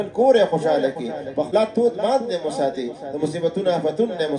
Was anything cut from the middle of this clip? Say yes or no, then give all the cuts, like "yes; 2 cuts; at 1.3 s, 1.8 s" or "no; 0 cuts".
yes; 1 cut; at 1.5 s